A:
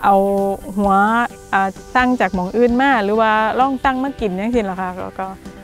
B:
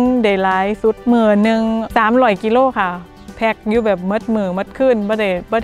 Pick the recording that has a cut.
B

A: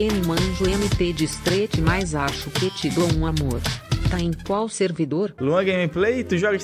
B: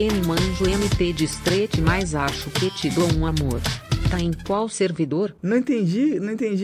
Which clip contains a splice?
A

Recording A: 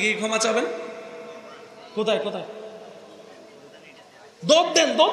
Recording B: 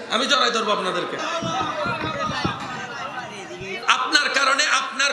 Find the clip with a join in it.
B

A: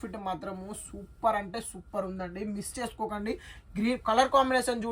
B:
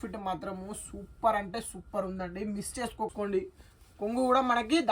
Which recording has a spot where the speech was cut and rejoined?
B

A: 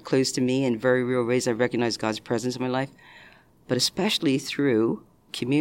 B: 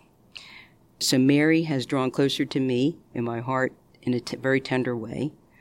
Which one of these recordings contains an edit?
B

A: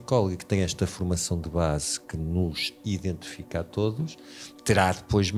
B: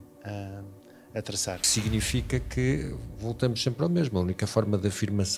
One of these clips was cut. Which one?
B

